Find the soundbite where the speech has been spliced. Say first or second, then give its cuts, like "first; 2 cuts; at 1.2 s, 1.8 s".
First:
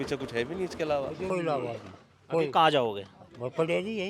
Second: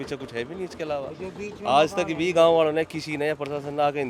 first; 1 cut; at 1.3 s